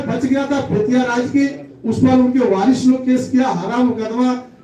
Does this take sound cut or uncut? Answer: uncut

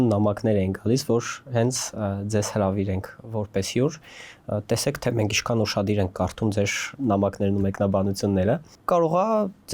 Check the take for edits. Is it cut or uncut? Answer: uncut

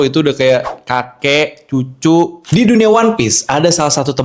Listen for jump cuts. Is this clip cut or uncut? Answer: cut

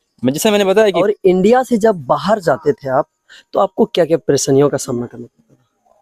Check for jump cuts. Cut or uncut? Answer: cut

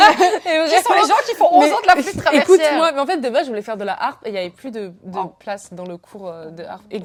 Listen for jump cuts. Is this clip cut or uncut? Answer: uncut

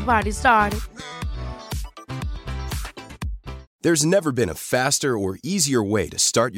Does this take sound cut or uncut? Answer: cut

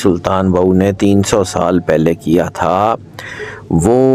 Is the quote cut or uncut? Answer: uncut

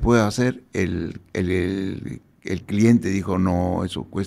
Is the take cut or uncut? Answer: uncut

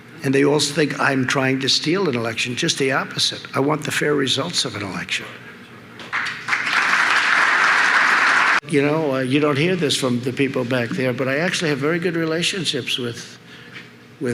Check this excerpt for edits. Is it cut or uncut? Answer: cut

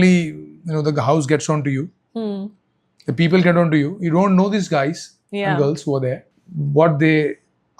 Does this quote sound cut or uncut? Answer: uncut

